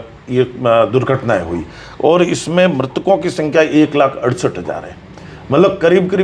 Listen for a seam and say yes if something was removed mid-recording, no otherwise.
no